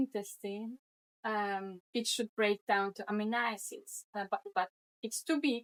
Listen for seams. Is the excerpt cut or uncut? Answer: uncut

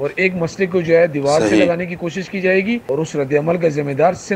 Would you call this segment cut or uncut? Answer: cut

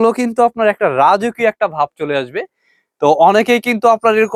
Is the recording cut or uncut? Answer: uncut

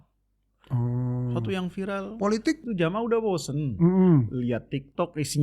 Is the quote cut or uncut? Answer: cut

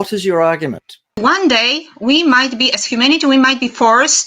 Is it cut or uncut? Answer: cut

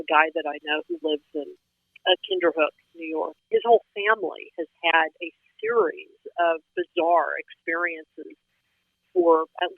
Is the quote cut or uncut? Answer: cut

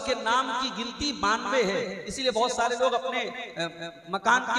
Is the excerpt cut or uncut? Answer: uncut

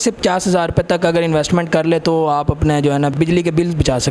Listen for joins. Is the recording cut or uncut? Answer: cut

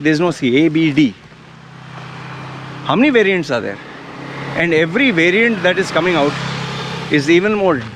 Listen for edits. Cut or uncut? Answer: uncut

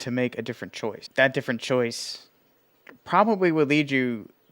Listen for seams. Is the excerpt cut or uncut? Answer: cut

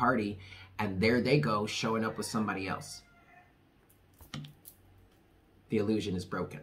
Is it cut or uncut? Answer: uncut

